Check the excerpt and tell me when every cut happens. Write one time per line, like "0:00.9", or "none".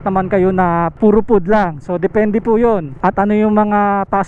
0:00.9
0:02.9

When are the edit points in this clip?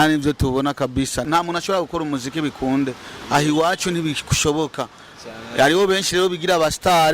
0:01.3

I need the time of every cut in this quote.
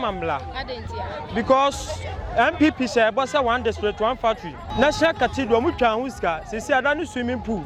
0:04.6

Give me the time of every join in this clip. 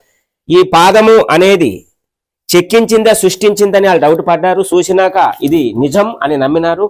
none

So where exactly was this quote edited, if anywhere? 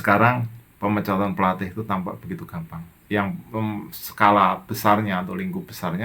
0:02.9

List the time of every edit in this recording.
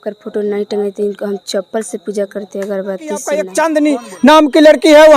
0:03.4

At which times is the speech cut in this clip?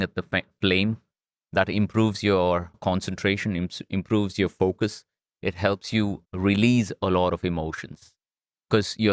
0:02.8
0:06.2

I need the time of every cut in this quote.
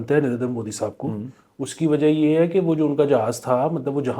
none

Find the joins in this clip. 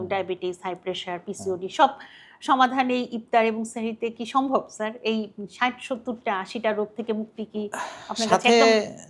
none

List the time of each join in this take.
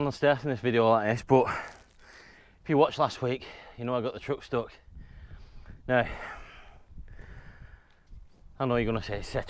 none

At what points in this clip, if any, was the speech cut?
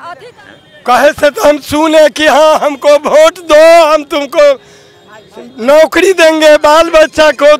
none

